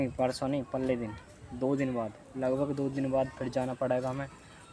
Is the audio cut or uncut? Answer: uncut